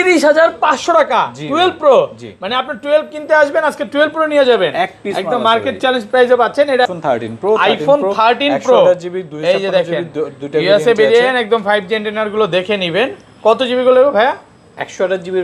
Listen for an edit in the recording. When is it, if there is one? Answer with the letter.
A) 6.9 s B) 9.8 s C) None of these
A